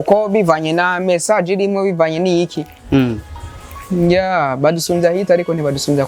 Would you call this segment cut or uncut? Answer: uncut